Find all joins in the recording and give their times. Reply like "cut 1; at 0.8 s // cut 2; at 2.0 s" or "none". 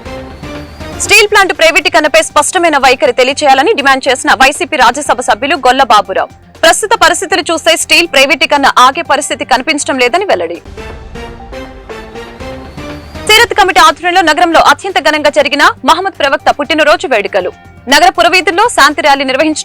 cut 1; at 1.0 s